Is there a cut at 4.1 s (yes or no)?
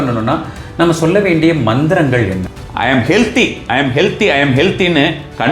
no